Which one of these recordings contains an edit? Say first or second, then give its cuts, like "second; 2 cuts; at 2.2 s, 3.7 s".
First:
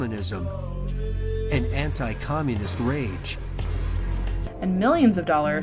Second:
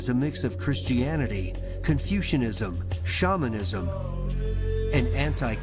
first; 1 cut; at 4.1 s